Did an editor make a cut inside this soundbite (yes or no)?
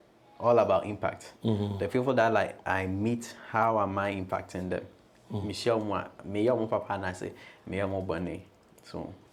no